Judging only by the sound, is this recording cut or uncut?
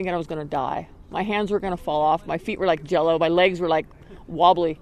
uncut